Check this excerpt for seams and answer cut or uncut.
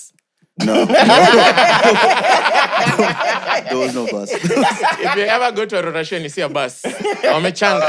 uncut